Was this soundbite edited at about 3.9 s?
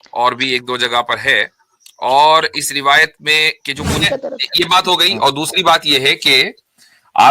yes; 1 cut; at 3.9 s

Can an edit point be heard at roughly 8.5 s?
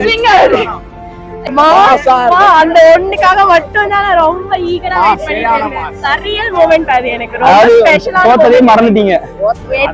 no; 1 cut; at 1.4 s

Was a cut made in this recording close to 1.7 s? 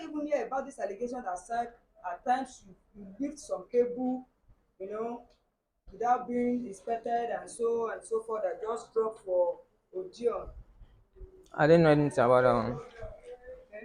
no; 0 cuts

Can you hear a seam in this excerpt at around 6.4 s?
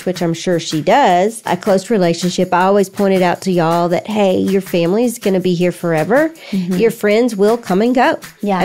no; 2 cuts; at 1.5 s, 4.7 s

